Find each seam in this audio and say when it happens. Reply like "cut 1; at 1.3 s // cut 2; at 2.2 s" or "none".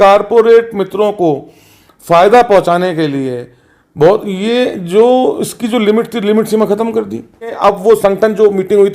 cut 1; at 7.5 s